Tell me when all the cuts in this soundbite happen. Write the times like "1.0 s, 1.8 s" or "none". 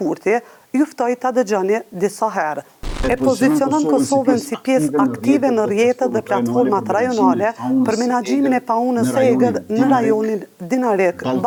none